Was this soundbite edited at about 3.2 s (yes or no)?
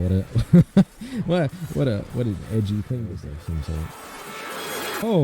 yes